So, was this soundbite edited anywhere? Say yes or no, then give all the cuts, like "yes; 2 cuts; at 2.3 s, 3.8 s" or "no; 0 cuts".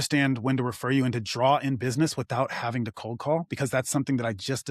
no; 0 cuts